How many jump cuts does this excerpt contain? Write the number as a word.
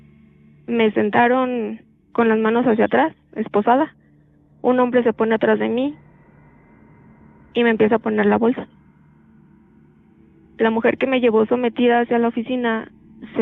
two